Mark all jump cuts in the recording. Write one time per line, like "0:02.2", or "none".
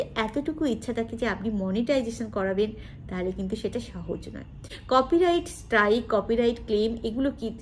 0:04.7